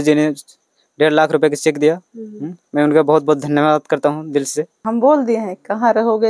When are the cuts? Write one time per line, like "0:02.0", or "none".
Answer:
0:04.8